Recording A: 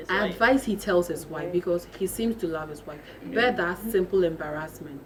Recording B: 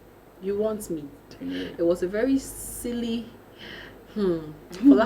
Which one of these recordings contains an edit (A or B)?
B